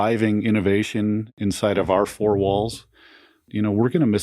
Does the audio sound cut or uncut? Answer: cut